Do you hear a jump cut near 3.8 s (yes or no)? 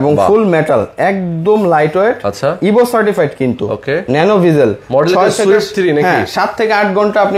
no